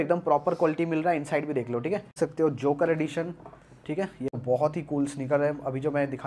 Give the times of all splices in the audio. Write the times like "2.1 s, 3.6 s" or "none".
2.2 s, 4.4 s